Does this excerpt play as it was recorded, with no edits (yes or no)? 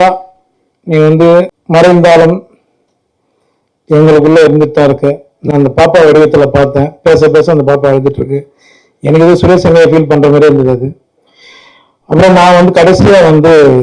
no